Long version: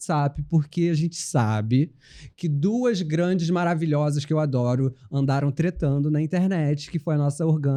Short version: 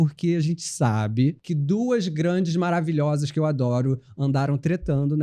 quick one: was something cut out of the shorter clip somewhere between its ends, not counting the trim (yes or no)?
yes